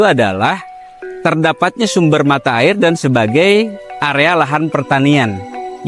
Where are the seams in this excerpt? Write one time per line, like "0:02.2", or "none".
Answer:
none